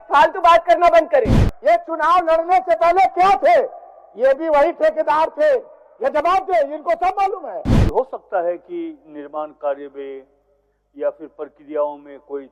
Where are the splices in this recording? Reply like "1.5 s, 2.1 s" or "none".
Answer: 1.2 s, 7.7 s